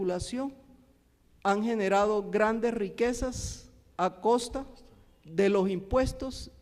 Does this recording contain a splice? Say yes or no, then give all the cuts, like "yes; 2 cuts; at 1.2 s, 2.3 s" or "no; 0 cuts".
no; 0 cuts